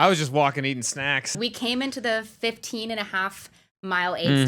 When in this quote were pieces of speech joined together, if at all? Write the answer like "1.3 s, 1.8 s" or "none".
1.4 s